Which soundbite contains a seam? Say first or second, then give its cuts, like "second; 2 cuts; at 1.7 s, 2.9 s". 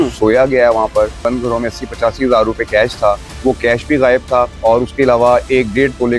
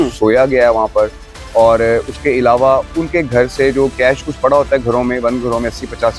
first; 3 cuts; at 1.2 s, 3.3 s, 4.5 s